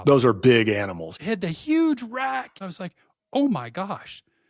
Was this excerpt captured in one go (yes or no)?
no